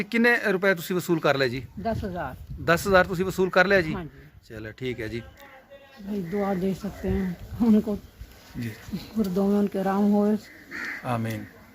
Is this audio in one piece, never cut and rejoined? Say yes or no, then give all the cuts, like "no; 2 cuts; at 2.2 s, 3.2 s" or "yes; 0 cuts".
no; 1 cut; at 6.0 s